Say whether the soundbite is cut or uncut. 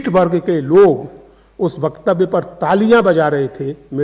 uncut